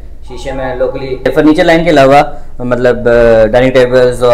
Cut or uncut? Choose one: cut